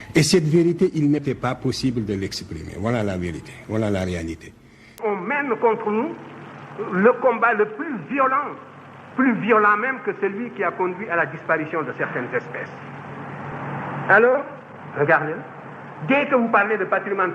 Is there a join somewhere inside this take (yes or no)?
yes